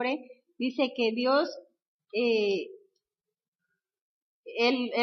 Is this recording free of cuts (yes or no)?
yes